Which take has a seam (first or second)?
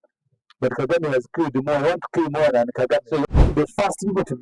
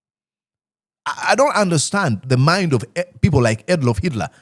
first